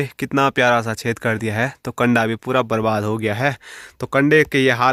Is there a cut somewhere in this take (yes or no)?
no